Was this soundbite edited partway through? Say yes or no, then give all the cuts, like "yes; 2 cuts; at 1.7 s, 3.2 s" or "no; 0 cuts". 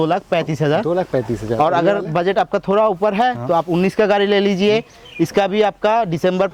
no; 0 cuts